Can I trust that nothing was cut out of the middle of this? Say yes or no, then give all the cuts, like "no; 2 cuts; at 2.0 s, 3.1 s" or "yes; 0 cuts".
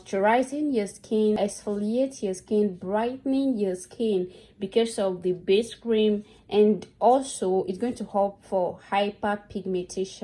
no; 1 cut; at 1.4 s